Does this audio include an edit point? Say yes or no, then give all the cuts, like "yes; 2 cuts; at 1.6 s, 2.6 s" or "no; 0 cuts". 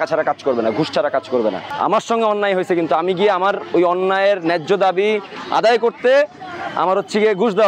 no; 0 cuts